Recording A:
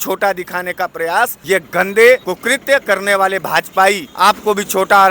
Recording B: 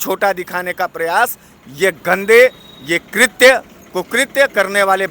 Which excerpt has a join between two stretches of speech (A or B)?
A